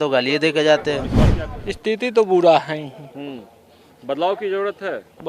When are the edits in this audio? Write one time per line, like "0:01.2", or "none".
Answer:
0:01.2